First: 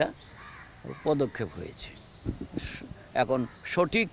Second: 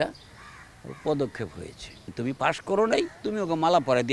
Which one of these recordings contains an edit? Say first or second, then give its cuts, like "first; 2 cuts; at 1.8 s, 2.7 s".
second; 1 cut; at 2.1 s